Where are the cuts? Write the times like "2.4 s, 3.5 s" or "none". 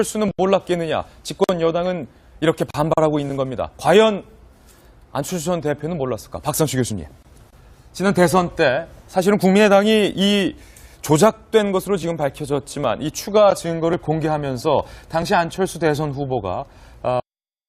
none

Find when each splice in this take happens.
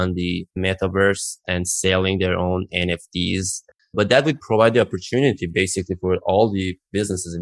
3.7 s

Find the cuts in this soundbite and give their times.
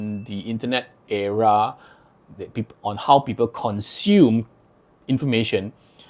none

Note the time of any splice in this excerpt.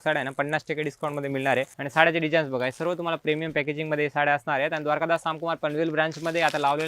1.8 s

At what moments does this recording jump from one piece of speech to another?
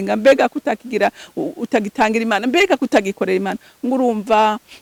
none

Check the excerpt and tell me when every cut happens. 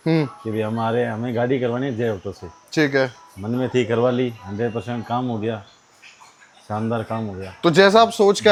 none

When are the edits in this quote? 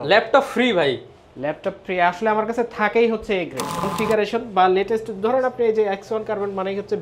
3.9 s

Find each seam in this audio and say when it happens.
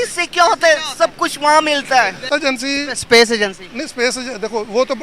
2.3 s

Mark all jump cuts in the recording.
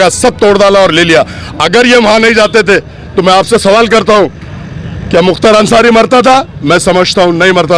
none

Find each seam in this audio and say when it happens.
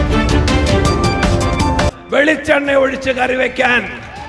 1.9 s

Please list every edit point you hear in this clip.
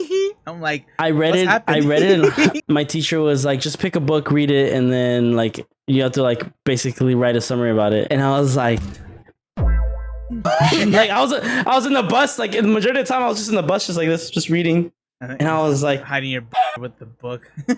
2.6 s, 8.1 s

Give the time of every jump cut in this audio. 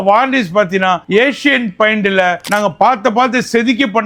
none

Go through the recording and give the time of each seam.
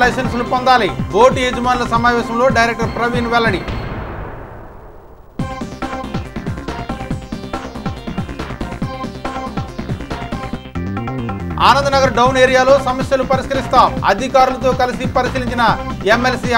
11.5 s

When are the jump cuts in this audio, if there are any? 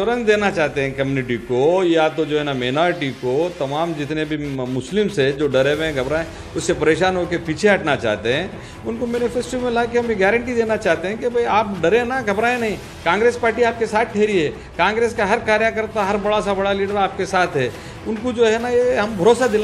none

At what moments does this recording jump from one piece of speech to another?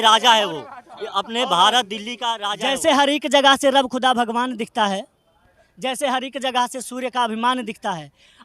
2.5 s

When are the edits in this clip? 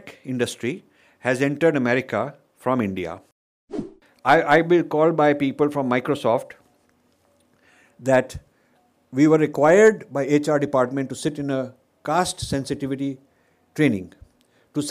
3.8 s

